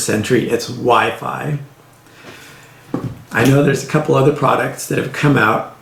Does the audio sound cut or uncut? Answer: uncut